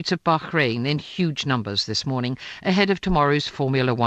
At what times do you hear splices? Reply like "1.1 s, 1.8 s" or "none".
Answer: 2.9 s